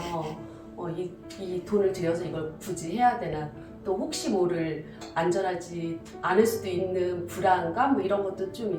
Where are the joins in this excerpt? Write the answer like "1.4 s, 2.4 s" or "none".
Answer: none